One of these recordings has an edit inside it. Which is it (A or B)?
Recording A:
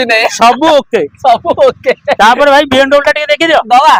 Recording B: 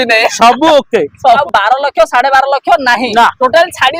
B